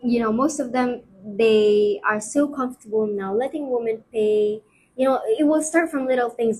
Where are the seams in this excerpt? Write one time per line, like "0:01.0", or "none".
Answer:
none